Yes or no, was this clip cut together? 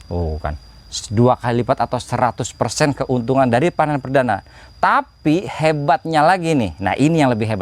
no